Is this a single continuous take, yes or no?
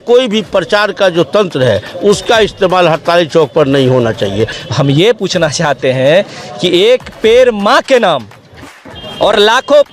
no